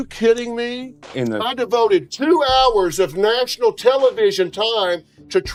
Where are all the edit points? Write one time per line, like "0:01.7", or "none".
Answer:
none